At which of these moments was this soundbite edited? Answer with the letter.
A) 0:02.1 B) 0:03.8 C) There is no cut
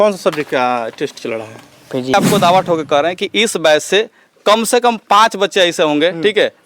A